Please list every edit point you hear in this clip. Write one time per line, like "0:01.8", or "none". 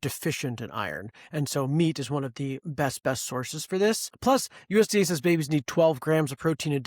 0:04.1